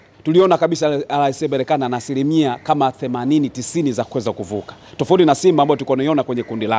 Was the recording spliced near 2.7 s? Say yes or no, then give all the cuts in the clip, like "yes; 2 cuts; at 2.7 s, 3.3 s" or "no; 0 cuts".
no; 0 cuts